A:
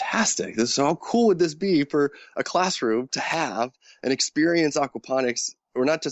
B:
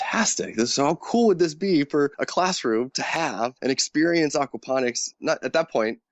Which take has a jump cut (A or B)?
B